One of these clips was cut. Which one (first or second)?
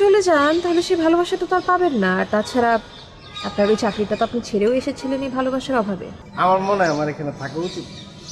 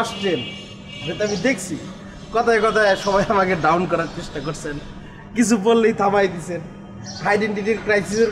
first